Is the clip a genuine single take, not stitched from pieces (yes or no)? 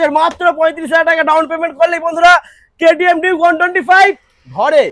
yes